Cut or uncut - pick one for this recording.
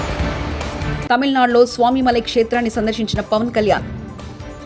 cut